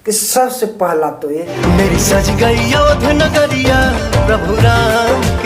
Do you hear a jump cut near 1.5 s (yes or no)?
yes